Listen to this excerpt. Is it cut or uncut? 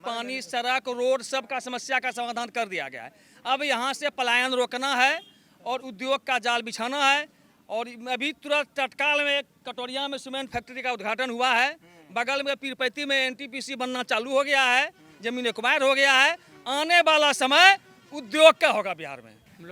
uncut